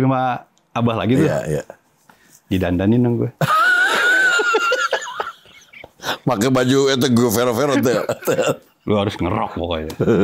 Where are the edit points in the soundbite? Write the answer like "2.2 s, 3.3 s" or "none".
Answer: none